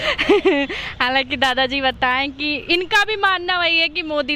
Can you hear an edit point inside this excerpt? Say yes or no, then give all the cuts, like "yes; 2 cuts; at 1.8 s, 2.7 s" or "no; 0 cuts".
no; 0 cuts